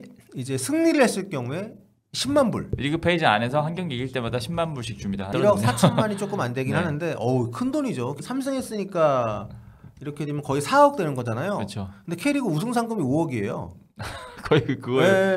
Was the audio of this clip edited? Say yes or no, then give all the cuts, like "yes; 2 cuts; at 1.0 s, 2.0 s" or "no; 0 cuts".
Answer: yes; 3 cuts; at 2.7 s, 5.3 s, 8.2 s